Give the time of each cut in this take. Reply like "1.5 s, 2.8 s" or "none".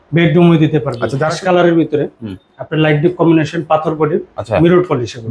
1.3 s